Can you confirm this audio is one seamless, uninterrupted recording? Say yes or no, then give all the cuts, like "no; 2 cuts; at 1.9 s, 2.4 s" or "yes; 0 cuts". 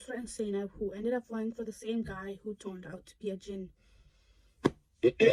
yes; 0 cuts